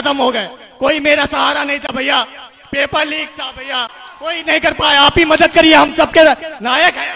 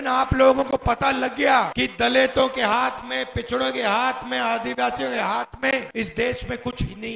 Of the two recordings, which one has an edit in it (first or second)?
second